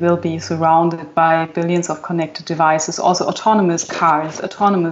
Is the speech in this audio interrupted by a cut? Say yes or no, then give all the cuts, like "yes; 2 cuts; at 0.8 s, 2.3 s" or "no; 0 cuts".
yes; 1 cut; at 1.1 s